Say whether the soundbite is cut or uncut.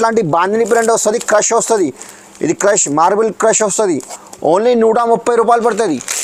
uncut